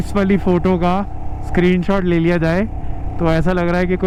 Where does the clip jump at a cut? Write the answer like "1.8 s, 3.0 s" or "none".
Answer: none

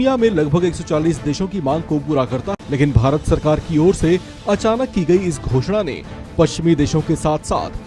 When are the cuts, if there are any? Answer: 2.5 s

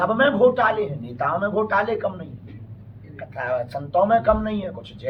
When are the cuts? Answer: none

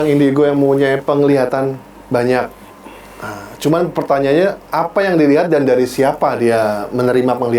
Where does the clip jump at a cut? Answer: none

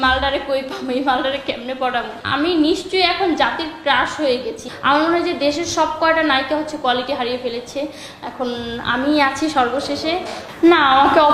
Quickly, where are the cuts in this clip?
2.2 s, 4.6 s, 10.4 s

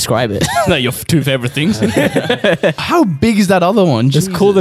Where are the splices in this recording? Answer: 2.8 s

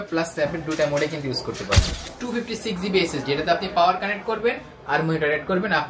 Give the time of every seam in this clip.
2.0 s

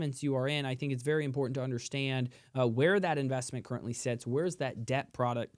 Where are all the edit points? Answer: none

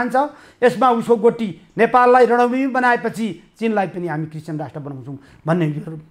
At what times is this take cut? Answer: none

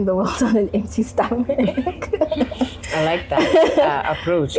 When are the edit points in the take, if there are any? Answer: none

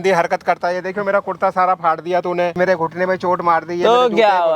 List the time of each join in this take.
2.6 s

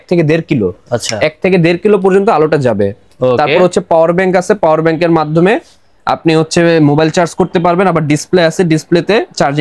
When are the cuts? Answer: none

